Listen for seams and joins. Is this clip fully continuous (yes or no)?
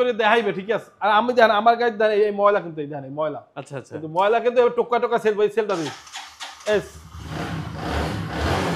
yes